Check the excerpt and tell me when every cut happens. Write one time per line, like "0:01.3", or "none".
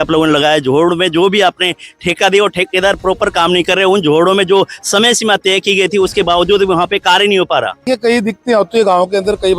0:07.9